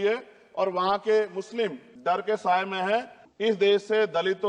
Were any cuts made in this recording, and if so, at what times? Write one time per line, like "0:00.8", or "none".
0:01.9
0:03.2